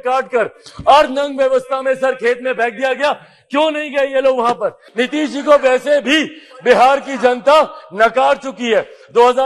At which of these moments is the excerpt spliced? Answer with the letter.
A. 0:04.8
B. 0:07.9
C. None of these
A